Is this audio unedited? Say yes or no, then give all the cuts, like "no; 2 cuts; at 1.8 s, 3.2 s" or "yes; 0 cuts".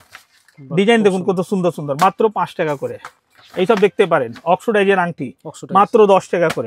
yes; 0 cuts